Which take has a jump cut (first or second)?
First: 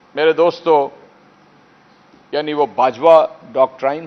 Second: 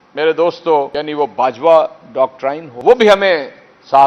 second